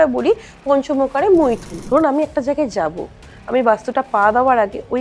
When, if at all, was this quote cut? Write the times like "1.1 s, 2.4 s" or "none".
1.7 s